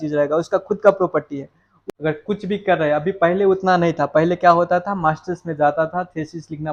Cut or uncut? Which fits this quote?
uncut